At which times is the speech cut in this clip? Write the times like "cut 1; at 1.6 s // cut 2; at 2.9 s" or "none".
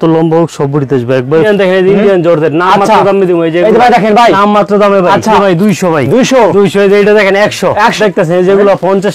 cut 1; at 1.4 s // cut 2; at 5.4 s // cut 3; at 8.0 s